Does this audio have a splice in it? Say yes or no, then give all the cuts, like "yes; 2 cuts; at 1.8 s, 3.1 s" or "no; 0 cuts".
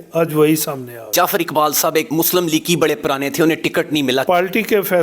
yes; 3 cuts; at 1.1 s, 2.1 s, 4.2 s